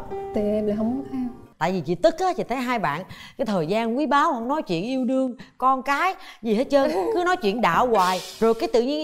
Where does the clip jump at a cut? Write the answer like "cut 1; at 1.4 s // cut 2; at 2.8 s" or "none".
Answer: cut 1; at 1.4 s